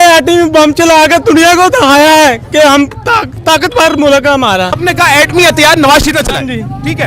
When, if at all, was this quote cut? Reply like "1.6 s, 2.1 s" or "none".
3.3 s, 4.8 s